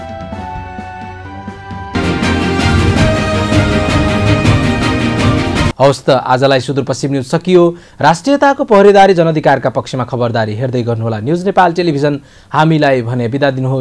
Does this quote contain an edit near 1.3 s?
no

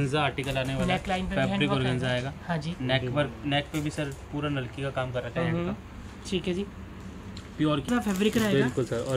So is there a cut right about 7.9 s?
yes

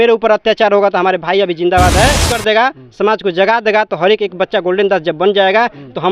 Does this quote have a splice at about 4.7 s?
no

